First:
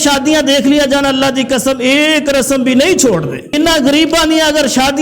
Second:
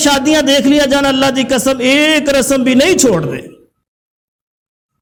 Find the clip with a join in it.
first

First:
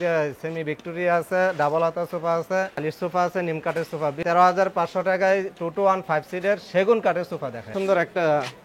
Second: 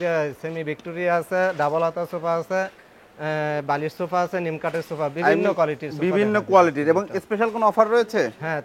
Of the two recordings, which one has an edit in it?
first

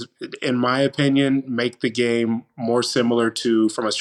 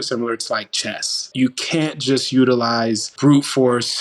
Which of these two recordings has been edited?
second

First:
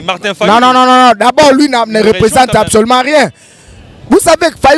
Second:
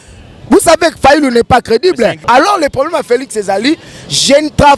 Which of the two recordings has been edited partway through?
second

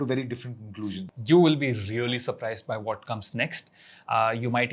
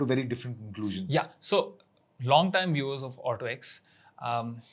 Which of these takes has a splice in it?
first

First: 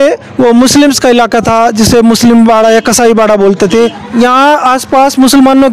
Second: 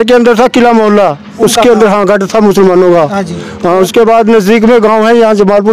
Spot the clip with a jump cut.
first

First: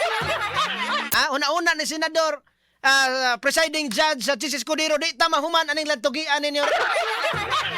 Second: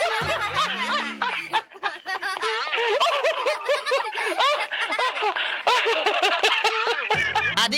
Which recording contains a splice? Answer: first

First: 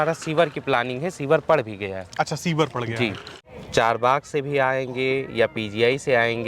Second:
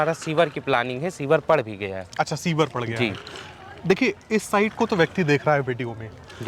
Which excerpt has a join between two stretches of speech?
first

